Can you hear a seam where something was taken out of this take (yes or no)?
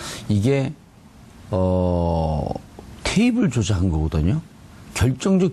no